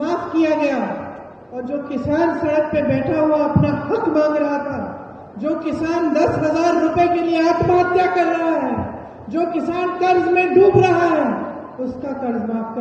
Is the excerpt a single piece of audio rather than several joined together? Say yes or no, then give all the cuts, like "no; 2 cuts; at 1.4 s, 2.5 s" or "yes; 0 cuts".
yes; 0 cuts